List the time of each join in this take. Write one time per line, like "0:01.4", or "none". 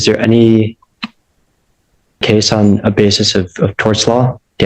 0:02.2